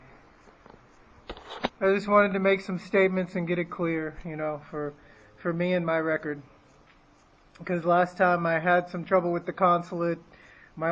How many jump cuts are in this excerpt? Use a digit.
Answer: 1